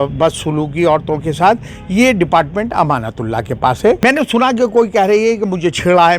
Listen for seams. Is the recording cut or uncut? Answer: cut